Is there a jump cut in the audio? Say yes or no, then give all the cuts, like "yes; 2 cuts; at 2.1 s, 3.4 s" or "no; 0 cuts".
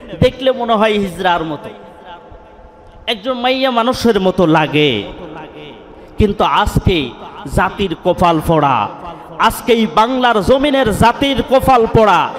no; 0 cuts